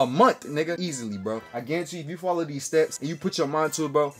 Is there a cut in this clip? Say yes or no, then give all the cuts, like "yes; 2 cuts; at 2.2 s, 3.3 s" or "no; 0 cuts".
yes; 2 cuts; at 1.0 s, 3.0 s